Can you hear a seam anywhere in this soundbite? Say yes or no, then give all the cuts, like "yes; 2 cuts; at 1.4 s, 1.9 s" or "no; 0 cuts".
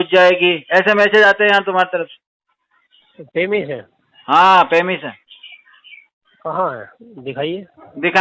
no; 0 cuts